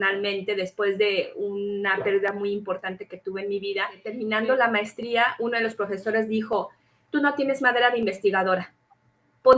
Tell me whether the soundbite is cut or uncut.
cut